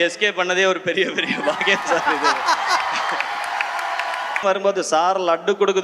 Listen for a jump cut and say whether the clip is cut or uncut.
cut